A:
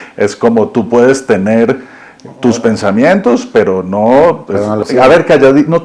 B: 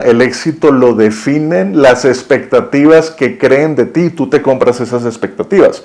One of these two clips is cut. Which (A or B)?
A